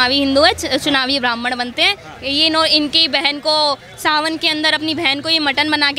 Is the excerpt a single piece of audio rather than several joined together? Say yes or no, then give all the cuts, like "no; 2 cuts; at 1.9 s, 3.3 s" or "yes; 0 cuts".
yes; 0 cuts